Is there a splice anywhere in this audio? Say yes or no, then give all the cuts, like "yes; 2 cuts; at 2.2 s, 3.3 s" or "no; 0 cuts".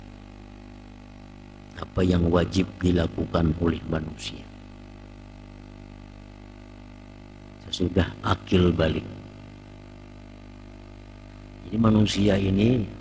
no; 0 cuts